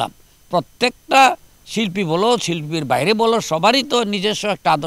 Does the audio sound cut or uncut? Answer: uncut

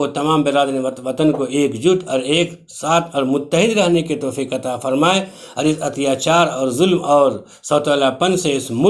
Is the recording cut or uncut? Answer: uncut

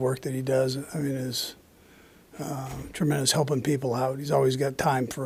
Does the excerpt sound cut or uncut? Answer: uncut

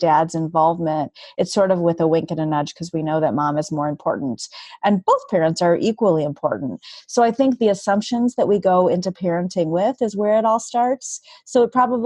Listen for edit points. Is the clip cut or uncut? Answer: uncut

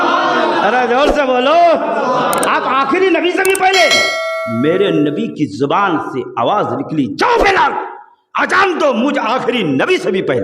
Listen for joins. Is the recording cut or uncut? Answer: uncut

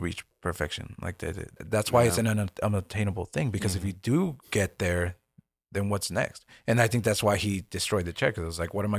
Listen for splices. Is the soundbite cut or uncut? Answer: cut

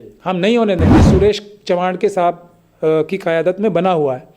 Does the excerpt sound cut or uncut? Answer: cut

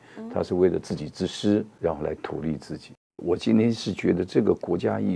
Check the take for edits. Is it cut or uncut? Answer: cut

